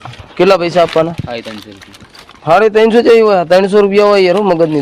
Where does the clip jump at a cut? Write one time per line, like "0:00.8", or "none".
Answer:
none